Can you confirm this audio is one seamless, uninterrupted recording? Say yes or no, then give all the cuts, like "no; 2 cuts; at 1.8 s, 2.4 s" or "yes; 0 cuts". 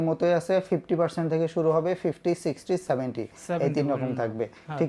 yes; 0 cuts